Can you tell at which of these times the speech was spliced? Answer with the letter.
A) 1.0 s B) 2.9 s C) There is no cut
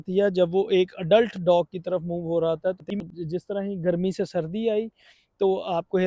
B